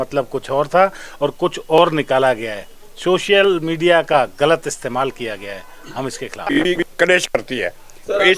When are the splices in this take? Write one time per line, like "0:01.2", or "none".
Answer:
0:06.7